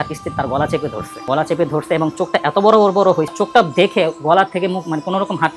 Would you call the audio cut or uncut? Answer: cut